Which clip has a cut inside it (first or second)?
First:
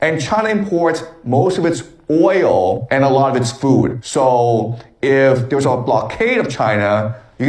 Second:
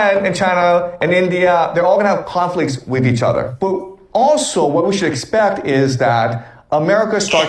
second